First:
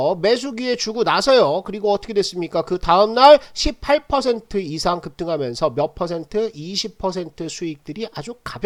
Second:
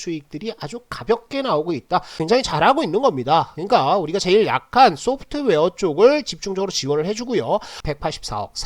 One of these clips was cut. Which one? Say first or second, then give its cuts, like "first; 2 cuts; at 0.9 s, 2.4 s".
second; 2 cuts; at 2.1 s, 7.7 s